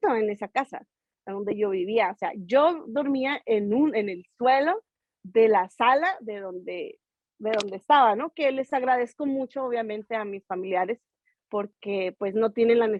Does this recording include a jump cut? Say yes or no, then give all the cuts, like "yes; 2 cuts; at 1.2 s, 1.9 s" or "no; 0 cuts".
no; 0 cuts